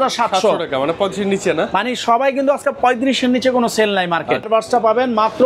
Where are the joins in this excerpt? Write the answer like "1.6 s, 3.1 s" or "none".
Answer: 4.5 s